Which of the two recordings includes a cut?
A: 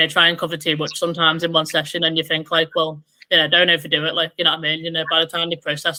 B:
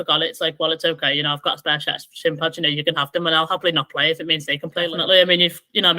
B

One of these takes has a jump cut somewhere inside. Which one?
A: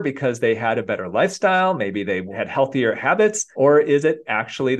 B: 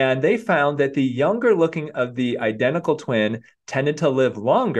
A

